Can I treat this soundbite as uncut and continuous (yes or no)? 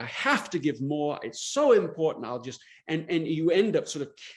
yes